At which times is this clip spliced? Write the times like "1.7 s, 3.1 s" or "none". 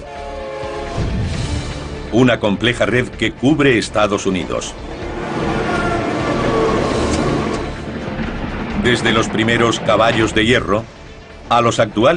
none